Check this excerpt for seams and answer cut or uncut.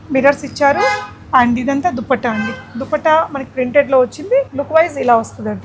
cut